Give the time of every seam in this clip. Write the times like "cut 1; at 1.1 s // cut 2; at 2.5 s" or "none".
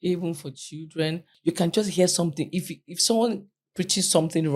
cut 1; at 1.3 s